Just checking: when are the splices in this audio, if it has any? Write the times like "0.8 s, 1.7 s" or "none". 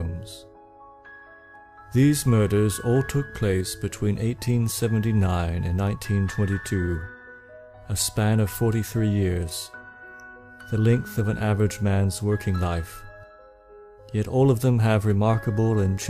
none